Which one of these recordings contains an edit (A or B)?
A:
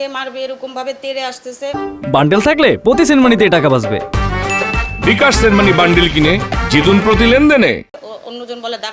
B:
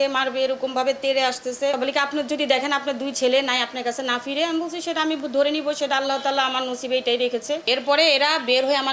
B